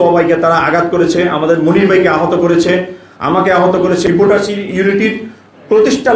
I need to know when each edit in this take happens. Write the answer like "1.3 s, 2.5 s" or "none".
4.0 s